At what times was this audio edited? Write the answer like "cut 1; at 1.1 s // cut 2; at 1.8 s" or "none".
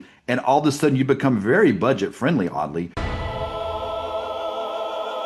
cut 1; at 3.0 s